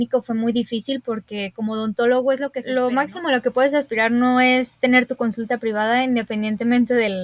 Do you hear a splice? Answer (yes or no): yes